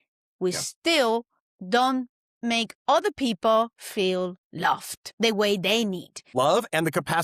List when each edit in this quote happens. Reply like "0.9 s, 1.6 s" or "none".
5.0 s, 6.2 s